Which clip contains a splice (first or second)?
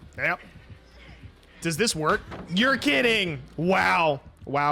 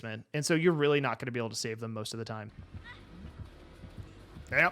second